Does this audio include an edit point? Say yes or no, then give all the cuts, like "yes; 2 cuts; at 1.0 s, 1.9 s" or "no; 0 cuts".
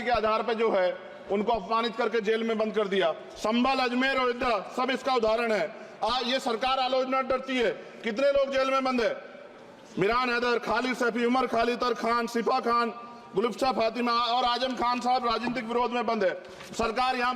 no; 0 cuts